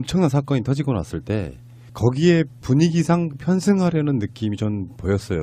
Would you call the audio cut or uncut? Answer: cut